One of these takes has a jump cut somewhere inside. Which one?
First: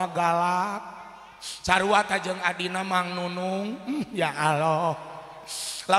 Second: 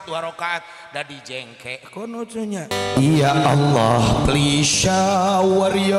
second; 1 cut; at 2.7 s

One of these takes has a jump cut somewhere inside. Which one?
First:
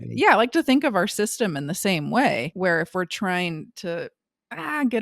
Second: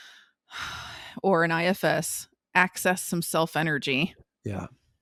first; 1 cut; at 2.5 s

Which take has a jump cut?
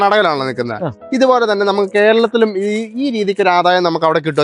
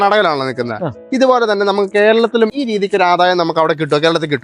second; 1 cut; at 2.5 s

